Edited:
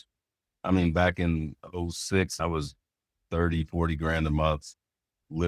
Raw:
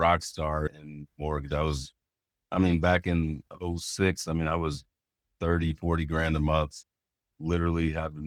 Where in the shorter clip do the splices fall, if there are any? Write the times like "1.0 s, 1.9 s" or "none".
2.4 s